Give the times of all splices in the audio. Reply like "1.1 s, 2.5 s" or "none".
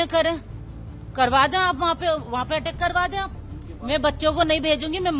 3.4 s